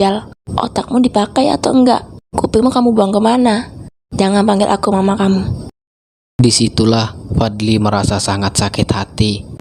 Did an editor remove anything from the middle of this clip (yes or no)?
no